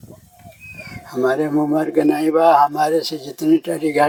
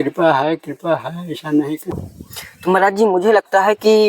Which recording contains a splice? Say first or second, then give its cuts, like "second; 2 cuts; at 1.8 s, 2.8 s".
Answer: second; 1 cut; at 1.9 s